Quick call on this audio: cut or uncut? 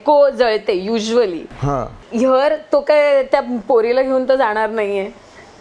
cut